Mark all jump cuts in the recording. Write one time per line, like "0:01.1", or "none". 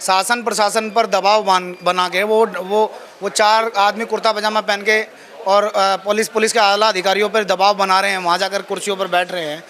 none